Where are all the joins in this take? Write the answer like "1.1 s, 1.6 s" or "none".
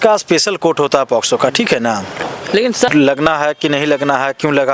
2.9 s